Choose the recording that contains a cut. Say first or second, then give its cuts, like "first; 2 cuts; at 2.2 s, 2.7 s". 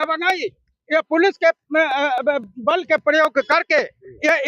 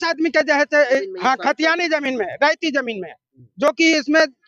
second; 1 cut; at 1.1 s